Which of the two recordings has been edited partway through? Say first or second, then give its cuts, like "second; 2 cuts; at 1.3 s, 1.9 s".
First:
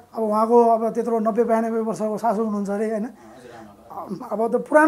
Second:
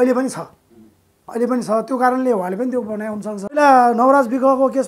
second; 1 cut; at 3.6 s